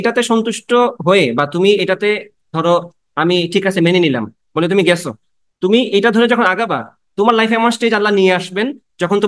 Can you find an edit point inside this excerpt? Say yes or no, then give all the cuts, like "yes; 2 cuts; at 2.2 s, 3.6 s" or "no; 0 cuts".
no; 0 cuts